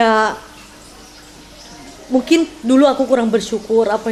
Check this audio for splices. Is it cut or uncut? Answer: uncut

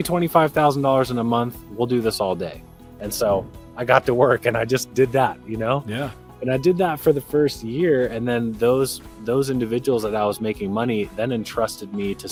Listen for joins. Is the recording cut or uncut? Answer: uncut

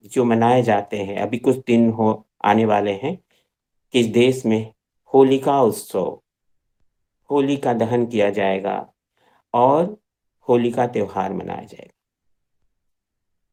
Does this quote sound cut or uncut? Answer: uncut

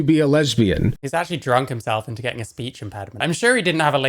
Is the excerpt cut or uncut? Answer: cut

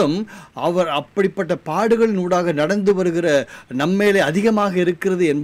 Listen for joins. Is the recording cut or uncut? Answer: uncut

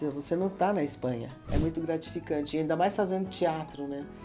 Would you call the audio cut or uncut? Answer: cut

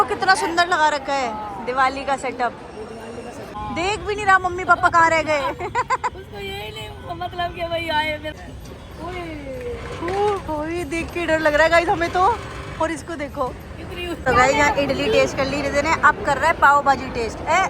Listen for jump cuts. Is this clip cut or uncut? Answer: cut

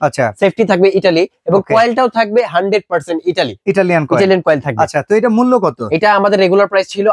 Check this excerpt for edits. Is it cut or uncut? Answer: uncut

